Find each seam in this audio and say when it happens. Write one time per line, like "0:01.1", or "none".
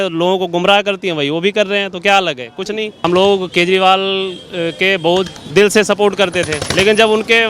0:03.0
0:05.4
0:06.6